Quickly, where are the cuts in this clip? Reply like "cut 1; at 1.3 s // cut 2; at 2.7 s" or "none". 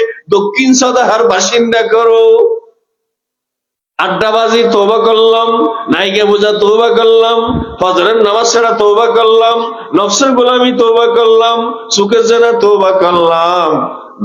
none